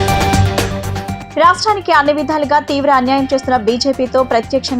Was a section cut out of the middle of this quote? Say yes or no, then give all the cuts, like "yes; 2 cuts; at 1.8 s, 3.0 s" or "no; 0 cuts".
yes; 1 cut; at 1.0 s